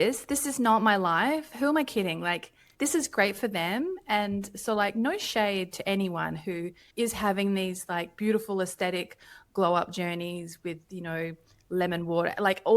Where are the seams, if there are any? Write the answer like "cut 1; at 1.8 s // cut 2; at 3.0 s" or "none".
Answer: none

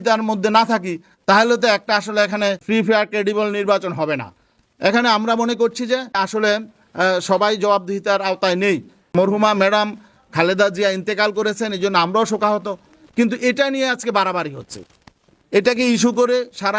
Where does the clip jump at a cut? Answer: cut 1; at 6.2 s // cut 2; at 9.0 s

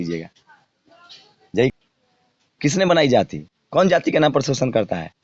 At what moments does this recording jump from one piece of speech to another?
cut 1; at 1.7 s

